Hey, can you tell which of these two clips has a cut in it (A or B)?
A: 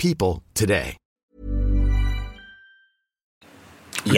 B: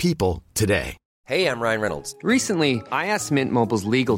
B